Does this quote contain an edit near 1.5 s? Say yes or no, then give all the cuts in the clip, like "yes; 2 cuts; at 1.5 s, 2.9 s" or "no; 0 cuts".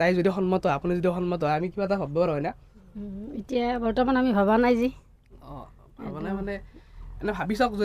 no; 0 cuts